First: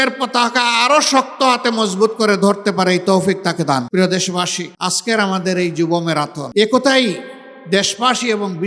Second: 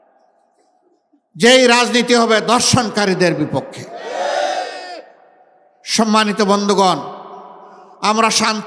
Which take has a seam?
first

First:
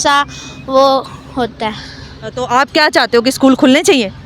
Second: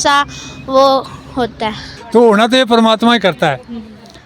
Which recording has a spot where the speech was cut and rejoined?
second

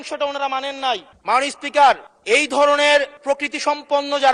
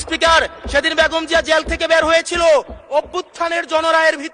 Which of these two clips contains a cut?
first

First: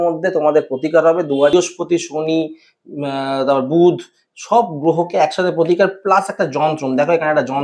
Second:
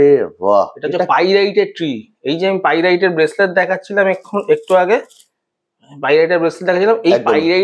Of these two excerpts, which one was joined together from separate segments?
first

